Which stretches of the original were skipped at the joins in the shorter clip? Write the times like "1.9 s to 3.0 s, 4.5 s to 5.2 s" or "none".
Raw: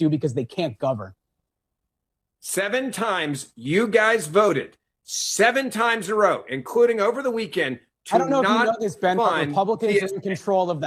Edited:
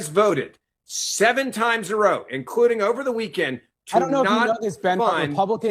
none